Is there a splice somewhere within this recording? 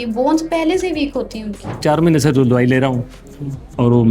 yes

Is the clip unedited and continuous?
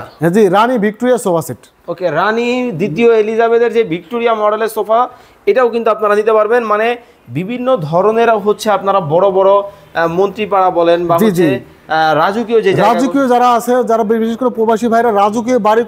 yes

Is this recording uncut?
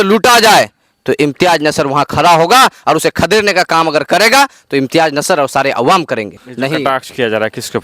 no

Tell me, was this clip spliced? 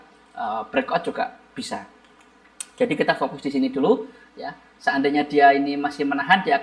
no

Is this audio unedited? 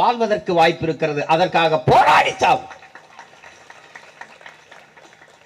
yes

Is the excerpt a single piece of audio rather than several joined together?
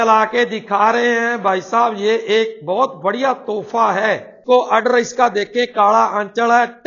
no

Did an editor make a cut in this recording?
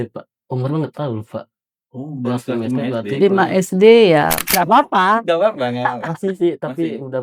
yes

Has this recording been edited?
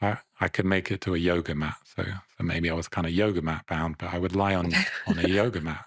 no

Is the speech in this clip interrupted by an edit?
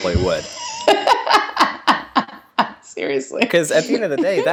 no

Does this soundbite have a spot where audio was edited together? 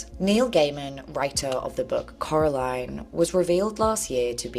yes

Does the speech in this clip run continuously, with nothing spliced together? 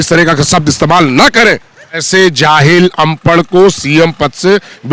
no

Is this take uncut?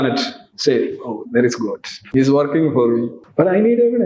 no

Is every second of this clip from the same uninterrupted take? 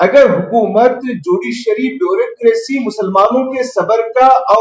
yes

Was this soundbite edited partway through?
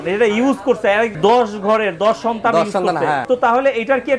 yes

